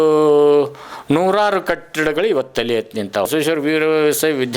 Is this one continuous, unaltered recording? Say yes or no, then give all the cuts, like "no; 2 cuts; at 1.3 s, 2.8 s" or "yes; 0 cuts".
no; 1 cut; at 3.3 s